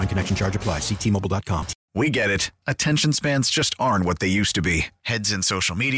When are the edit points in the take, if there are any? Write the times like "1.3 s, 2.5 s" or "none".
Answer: 1.8 s